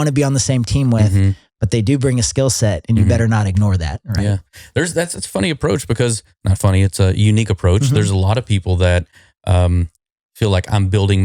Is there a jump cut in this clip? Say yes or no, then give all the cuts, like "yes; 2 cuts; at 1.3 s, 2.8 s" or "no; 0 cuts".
no; 0 cuts